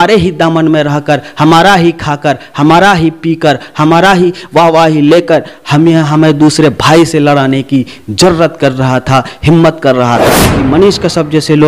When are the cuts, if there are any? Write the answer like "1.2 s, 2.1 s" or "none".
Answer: 10.5 s

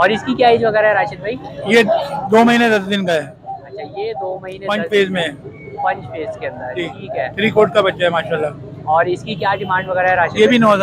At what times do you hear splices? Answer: none

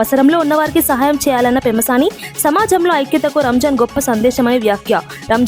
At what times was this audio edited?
none

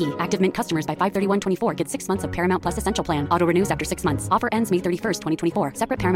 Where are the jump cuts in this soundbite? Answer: none

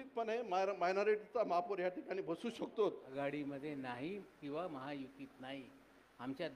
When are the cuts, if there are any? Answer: 3.1 s

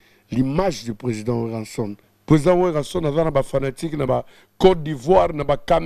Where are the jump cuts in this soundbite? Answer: 2.1 s

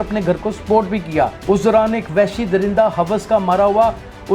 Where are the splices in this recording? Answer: 1.4 s

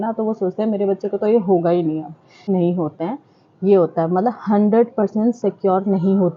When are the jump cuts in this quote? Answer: 2.5 s

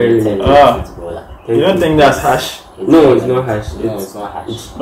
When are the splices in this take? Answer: none

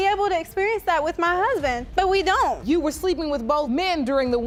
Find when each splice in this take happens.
none

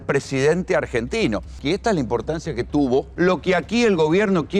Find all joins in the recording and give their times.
1.6 s, 3.1 s

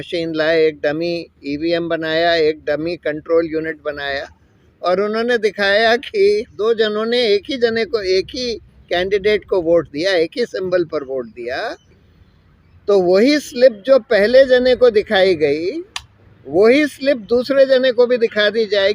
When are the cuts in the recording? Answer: 6.5 s

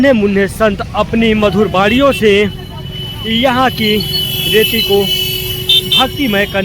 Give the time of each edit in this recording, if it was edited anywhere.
none

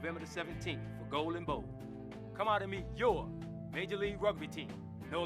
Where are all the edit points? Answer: none

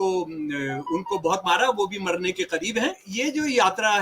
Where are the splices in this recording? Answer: 3.0 s

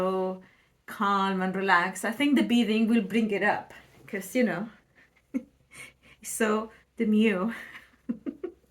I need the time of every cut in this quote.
none

